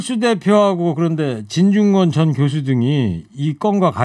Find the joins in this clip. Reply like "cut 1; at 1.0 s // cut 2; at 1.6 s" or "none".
none